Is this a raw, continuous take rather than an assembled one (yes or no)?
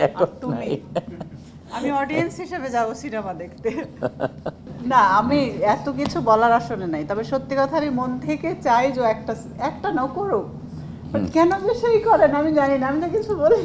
yes